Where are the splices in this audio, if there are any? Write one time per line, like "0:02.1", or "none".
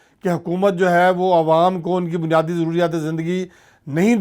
none